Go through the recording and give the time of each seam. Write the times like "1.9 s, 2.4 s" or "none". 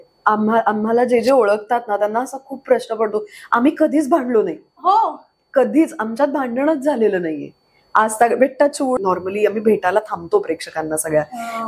9.0 s